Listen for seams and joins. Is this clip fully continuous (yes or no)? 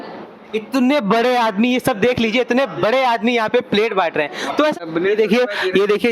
no